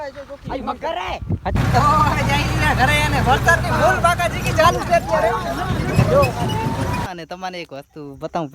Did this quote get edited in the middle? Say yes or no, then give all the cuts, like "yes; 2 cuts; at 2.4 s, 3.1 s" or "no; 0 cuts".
yes; 2 cuts; at 1.5 s, 7.1 s